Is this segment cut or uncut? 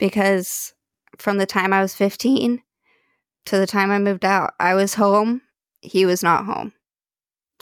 cut